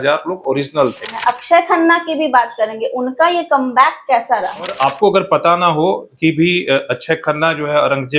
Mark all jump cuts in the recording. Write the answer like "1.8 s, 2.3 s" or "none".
1.1 s, 4.7 s

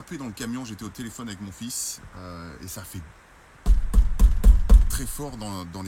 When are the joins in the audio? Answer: none

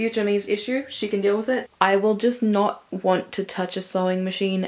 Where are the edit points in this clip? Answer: 1.7 s

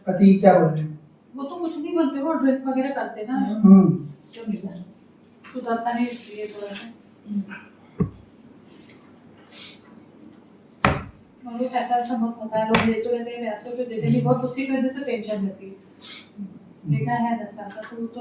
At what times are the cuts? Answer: none

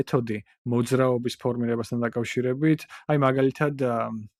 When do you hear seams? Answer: none

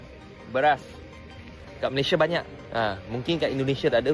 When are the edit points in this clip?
none

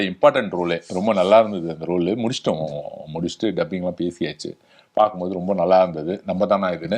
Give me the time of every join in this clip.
none

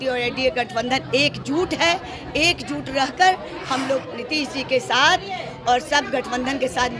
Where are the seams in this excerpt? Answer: none

